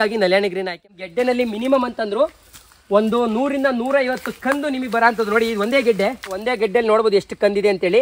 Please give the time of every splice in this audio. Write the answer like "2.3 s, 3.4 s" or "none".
0.9 s, 6.5 s